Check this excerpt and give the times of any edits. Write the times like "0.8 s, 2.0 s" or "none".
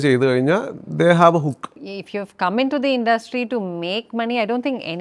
1.7 s

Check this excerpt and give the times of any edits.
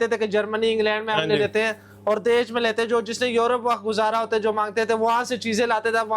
none

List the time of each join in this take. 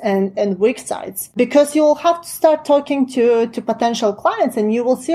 1.4 s

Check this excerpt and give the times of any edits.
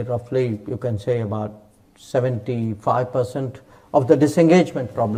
none

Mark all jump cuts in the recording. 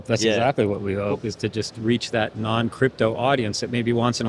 none

